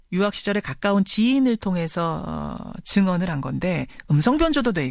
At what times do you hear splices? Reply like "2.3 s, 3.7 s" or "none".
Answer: none